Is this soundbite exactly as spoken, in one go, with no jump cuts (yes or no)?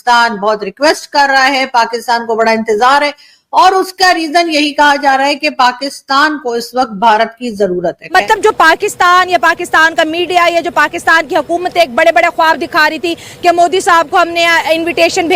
no